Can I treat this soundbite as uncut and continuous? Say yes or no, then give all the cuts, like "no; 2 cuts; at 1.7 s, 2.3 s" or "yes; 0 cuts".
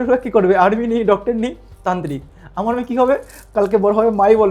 yes; 0 cuts